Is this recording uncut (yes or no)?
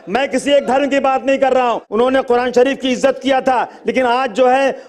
no